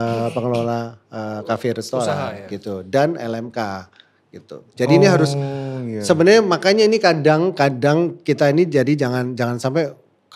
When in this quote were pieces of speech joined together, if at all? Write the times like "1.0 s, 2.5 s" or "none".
none